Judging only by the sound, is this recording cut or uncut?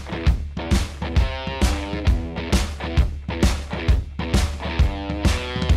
uncut